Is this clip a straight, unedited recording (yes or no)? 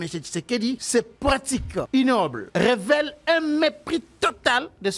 no